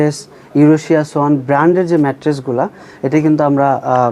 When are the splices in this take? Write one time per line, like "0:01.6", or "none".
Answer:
none